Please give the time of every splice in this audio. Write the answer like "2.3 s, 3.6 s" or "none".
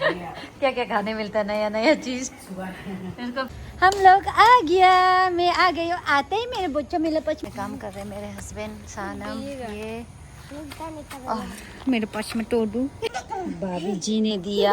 3.5 s, 7.4 s, 13.1 s